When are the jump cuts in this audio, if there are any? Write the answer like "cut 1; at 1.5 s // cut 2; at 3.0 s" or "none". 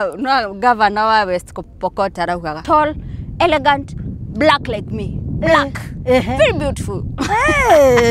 cut 1; at 2.6 s